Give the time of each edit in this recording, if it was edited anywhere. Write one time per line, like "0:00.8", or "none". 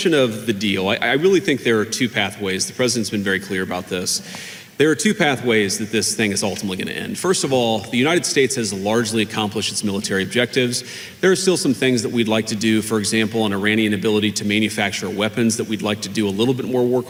none